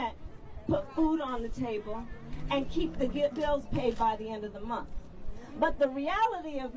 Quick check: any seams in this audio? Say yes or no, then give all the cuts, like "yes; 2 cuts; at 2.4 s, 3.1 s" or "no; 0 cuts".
yes; 1 cut; at 4.4 s